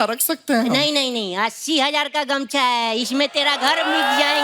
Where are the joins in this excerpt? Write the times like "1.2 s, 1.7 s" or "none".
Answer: none

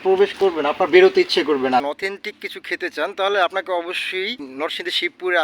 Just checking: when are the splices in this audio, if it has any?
1.8 s, 4.4 s

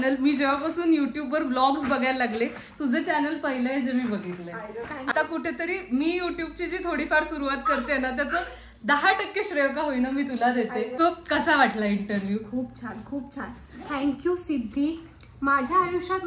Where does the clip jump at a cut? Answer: 5.1 s, 10.9 s

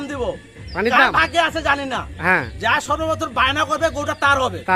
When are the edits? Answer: none

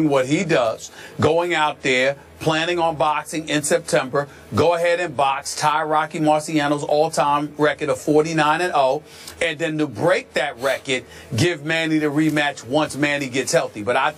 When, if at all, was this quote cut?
5.8 s

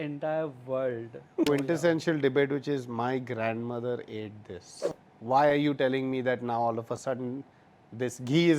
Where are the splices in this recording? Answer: 1.5 s, 4.8 s

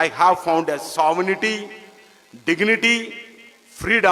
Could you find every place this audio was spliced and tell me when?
none

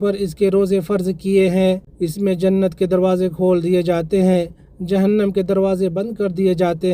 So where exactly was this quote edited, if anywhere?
2.0 s

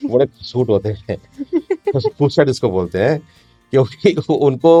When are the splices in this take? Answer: none

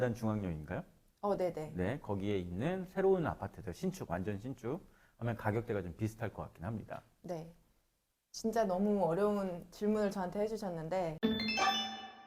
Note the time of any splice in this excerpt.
11.1 s

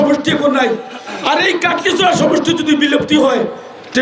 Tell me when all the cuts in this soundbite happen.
none

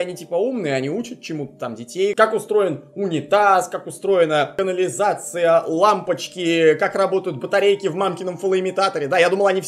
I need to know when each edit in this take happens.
2.1 s

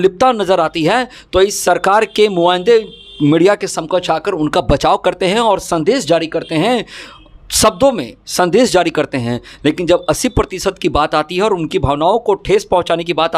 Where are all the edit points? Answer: none

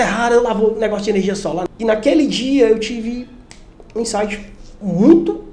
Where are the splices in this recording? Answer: 1.6 s

